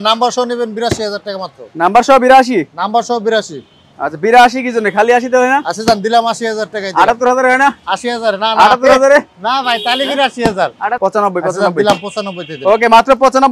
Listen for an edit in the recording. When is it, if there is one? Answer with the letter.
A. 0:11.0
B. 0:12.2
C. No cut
A